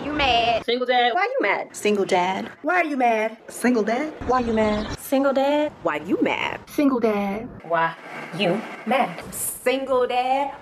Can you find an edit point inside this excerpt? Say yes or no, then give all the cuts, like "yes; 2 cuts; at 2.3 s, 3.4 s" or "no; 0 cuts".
no; 0 cuts